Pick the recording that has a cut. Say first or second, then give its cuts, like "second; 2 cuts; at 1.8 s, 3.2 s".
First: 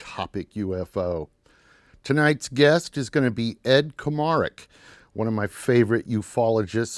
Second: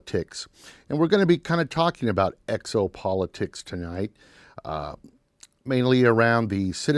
first; 1 cut; at 3.6 s